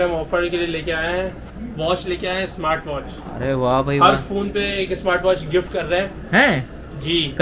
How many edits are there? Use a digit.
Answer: 0